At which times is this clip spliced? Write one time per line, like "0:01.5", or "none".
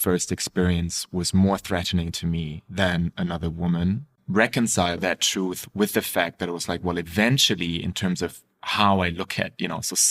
0:04.1
0:05.0